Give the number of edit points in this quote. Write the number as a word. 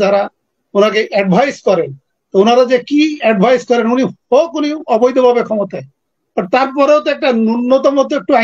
zero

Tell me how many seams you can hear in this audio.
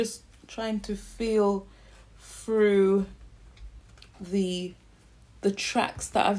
zero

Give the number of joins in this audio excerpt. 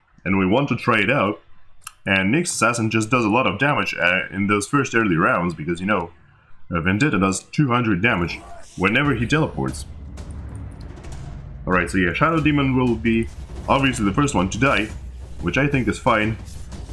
zero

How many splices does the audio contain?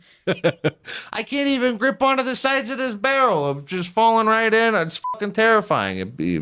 zero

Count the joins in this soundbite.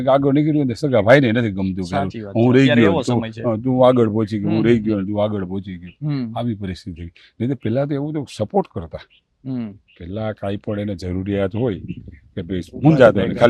zero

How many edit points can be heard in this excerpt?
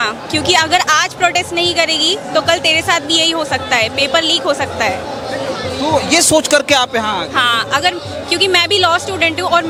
zero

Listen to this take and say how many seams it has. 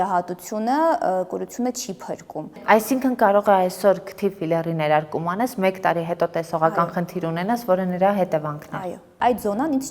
two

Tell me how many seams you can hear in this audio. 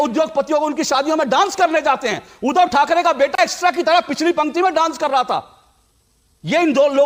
zero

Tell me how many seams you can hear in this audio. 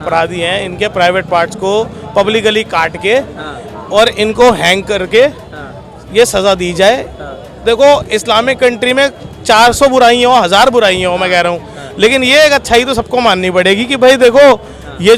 zero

